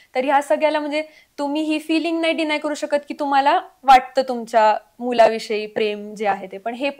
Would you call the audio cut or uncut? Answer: uncut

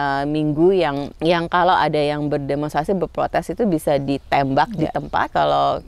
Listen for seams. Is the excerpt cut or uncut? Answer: uncut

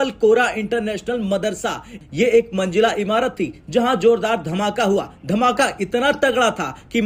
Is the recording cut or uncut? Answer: uncut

